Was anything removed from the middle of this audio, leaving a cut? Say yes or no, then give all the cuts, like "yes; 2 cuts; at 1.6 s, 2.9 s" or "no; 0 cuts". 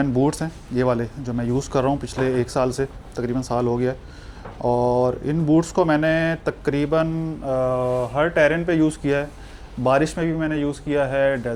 no; 0 cuts